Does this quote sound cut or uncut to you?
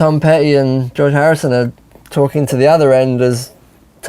cut